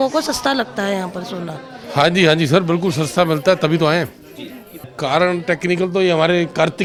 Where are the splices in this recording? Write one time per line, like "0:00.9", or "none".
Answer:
none